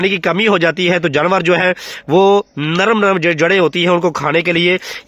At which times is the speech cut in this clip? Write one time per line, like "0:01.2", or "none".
none